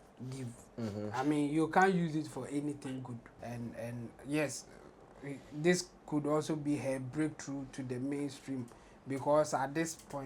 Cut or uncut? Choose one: cut